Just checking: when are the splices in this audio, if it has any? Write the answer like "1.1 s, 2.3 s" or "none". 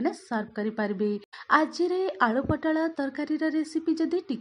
1.3 s